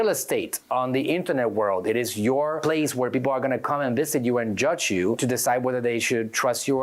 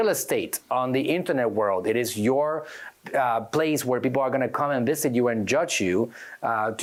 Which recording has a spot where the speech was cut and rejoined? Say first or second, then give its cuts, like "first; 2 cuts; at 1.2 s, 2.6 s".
first; 2 cuts; at 2.6 s, 5.2 s